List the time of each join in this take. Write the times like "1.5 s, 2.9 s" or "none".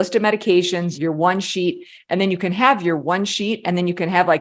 0.9 s